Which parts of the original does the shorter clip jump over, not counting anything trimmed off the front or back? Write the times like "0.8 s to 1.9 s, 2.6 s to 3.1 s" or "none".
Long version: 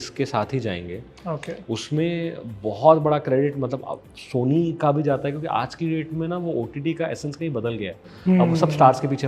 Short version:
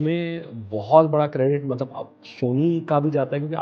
none